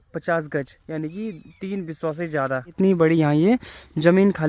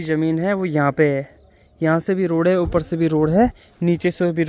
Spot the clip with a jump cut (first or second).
first